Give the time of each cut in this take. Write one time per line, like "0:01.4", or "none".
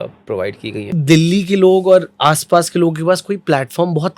0:00.9